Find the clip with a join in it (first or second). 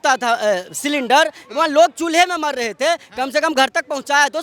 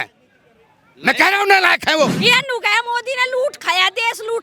second